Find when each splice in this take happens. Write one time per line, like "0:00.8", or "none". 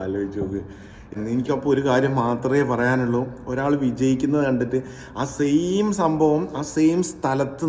0:01.1